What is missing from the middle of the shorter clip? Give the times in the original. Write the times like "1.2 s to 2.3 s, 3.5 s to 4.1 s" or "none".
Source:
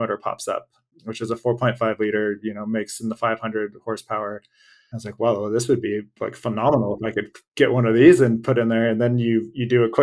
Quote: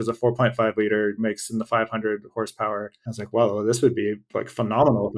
2.4 s to 2.7 s, 4.5 s to 4.9 s